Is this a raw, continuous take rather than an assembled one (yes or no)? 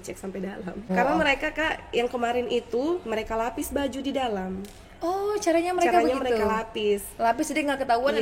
no